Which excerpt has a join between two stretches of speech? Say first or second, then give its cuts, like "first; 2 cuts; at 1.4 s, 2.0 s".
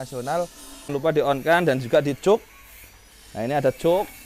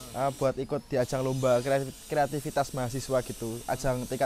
first; 1 cut; at 1.0 s